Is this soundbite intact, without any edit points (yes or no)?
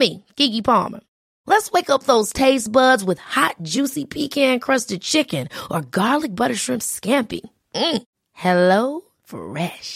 yes